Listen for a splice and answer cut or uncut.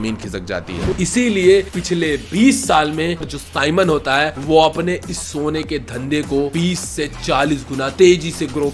cut